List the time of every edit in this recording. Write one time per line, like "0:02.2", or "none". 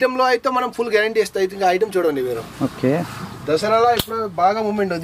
none